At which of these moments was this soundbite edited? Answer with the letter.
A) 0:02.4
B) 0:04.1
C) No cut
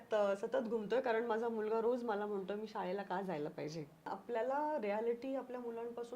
B